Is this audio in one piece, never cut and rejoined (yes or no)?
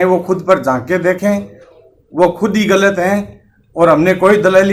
yes